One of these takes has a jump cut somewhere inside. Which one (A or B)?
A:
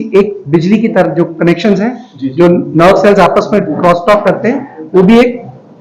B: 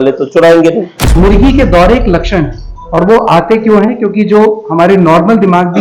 B